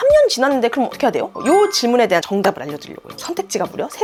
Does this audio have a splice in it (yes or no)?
no